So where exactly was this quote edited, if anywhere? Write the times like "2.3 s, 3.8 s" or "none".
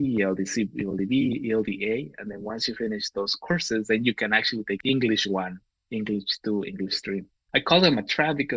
4.8 s, 7.4 s